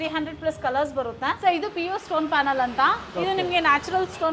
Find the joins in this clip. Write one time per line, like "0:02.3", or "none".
0:01.4